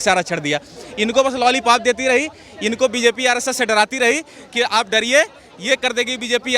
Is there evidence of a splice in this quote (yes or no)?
no